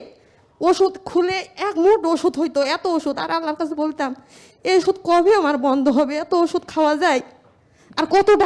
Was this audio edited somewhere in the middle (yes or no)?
no